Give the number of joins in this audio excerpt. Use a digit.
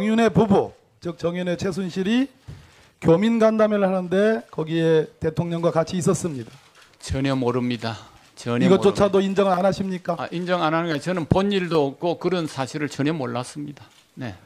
1